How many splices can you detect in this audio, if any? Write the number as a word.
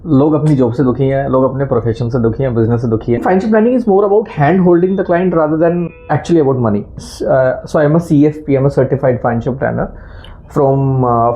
three